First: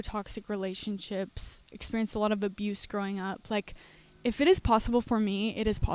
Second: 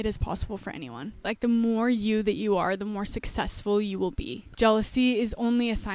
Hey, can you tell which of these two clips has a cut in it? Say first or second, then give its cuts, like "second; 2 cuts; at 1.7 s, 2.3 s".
second; 2 cuts; at 1.3 s, 4.5 s